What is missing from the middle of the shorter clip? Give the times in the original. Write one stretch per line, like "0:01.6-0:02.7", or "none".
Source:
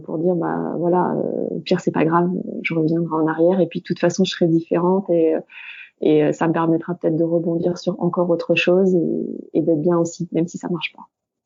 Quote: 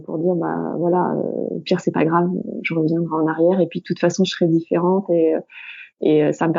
none